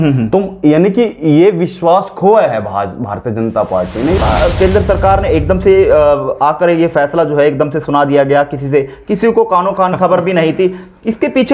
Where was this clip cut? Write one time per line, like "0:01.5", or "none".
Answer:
0:04.1